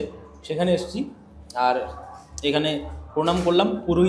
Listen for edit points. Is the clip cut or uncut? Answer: uncut